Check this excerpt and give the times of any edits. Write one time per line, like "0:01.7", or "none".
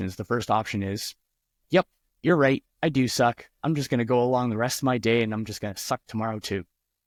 none